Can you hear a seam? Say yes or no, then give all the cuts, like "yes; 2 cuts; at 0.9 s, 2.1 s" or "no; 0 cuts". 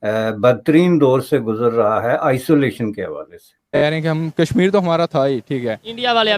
yes; 1 cut; at 3.7 s